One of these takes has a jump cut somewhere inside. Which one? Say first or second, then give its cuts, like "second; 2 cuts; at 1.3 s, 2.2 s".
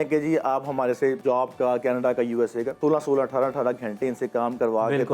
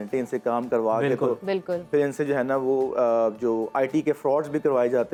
first; 2 cuts; at 1.2 s, 2.7 s